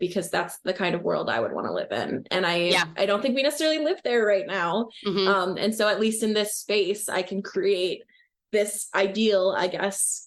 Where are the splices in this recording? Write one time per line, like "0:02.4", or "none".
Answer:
none